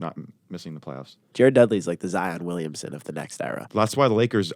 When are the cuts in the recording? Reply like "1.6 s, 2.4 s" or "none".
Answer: 3.6 s